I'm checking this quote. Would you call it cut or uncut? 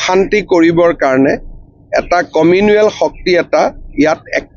uncut